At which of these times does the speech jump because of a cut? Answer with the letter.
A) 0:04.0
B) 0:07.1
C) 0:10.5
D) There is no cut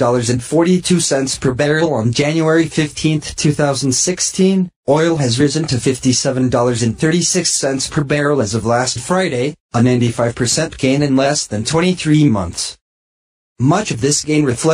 D